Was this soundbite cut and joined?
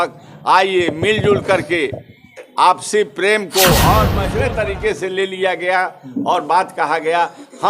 yes; 1 cut; at 4.2 s

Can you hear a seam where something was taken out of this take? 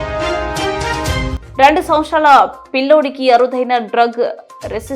yes; 1 cut; at 1.3 s

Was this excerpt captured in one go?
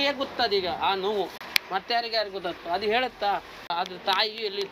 no; 2 cuts; at 1.4 s, 3.7 s

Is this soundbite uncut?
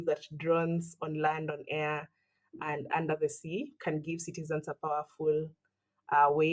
yes; 0 cuts

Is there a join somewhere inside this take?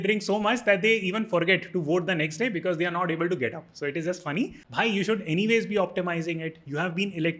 yes; 1 cut; at 4.6 s

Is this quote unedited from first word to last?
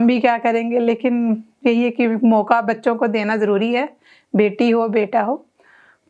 yes; 0 cuts

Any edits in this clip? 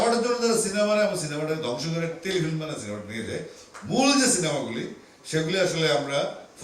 no; 0 cuts

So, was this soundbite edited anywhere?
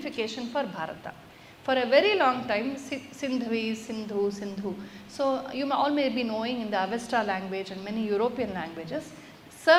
no; 0 cuts

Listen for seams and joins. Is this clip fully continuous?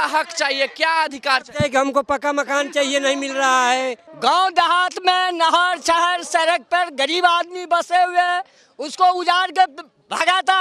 no; 1 cut; at 4.1 s

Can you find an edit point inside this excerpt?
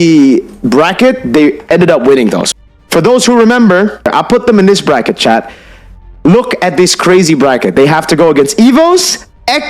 yes; 2 cuts; at 2.4 s, 4.1 s

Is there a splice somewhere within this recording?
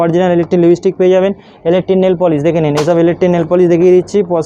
no; 0 cuts

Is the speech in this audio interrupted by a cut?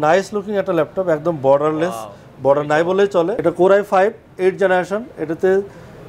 yes; 1 cut; at 3.3 s

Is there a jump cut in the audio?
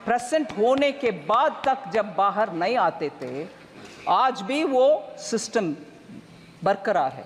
no; 0 cuts

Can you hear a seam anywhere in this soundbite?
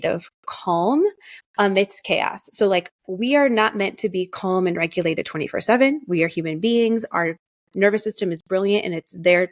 no; 0 cuts

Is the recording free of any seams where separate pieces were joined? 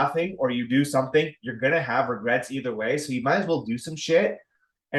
yes; 0 cuts

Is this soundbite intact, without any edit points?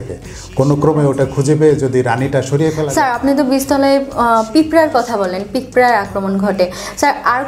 no; 1 cut; at 2.8 s

